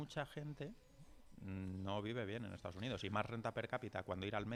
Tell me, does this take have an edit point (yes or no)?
no